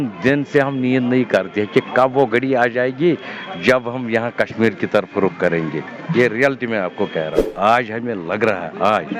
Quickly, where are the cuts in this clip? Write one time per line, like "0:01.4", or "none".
0:07.4